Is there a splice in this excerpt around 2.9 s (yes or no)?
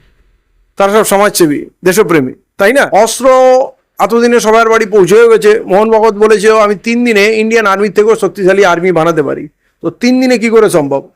yes